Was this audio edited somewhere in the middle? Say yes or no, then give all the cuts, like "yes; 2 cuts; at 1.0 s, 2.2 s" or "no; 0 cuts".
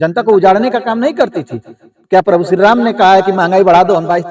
no; 0 cuts